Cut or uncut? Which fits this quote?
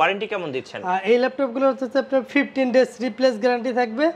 uncut